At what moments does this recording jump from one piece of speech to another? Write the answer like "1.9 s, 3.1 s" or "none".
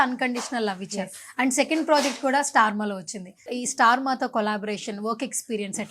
3.4 s